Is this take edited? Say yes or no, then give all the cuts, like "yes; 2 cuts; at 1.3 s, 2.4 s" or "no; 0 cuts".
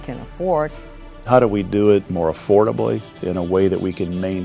yes; 3 cuts; at 1.1 s, 2.1 s, 3.1 s